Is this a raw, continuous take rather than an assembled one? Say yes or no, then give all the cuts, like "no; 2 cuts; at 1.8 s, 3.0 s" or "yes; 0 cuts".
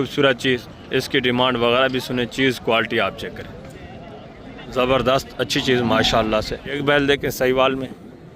no; 1 cut; at 6.8 s